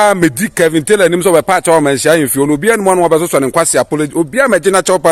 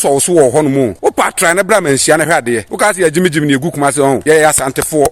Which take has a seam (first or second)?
second